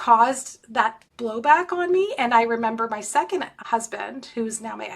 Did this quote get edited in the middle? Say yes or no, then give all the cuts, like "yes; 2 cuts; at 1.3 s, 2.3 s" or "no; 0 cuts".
yes; 2 cuts; at 1.1 s, 3.6 s